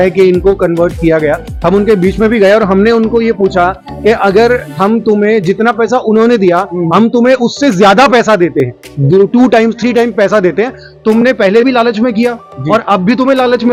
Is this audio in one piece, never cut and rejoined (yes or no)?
yes